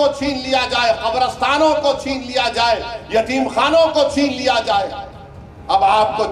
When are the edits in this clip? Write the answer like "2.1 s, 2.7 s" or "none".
none